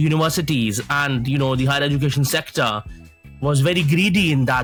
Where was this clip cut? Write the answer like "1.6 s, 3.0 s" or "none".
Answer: none

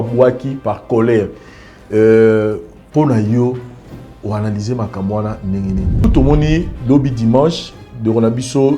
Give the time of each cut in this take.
6.0 s

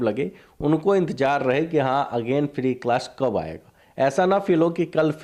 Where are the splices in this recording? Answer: none

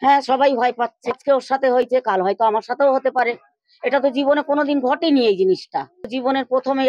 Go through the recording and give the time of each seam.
1.1 s, 6.1 s

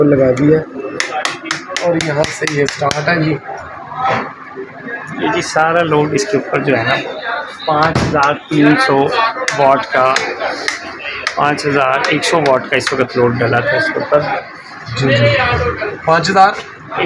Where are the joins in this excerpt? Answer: none

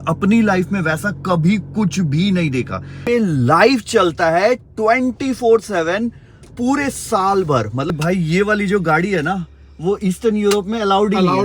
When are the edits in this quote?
3.0 s, 7.9 s

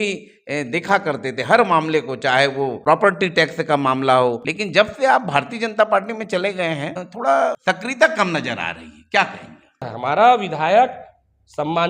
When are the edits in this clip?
2.7 s, 4.4 s, 7.1 s, 7.6 s, 9.9 s

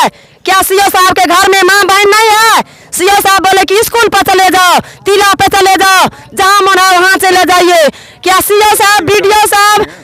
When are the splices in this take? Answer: none

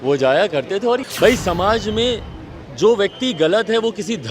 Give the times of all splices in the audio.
1.0 s

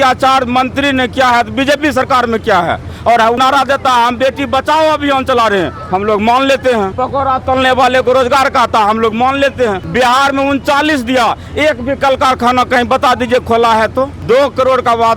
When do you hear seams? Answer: 3.4 s, 7.0 s, 9.8 s, 14.2 s

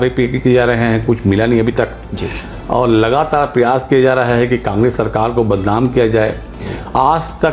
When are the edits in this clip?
none

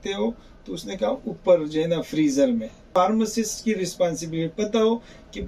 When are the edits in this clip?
2.9 s

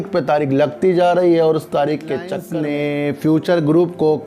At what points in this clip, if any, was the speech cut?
2.4 s

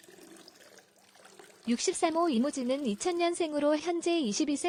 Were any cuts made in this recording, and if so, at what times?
none

